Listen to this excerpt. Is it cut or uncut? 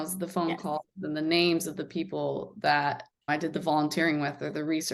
uncut